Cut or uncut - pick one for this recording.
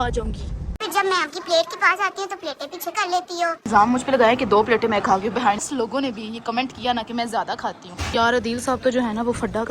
cut